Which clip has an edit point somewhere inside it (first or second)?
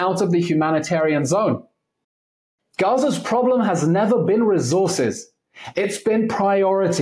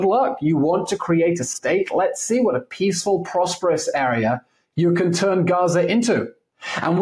first